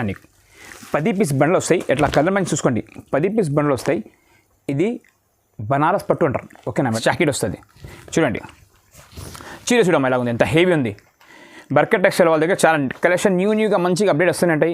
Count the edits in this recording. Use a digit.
1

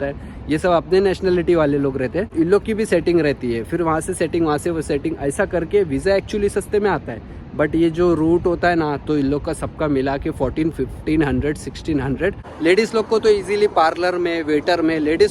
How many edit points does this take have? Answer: 2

